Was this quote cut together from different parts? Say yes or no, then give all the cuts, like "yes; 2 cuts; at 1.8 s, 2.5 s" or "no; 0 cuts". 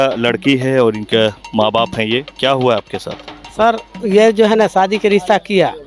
no; 0 cuts